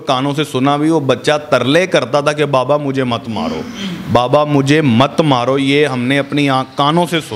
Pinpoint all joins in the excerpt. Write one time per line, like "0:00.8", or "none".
none